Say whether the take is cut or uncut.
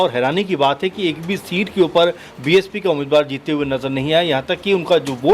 uncut